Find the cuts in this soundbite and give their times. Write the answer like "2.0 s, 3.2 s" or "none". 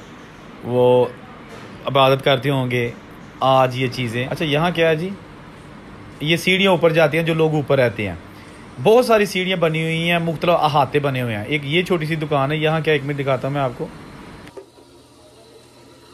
4.3 s